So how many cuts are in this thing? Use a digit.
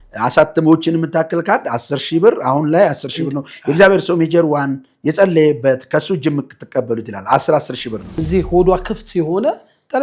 1